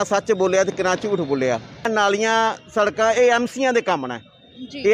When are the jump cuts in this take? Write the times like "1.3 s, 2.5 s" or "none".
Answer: 1.9 s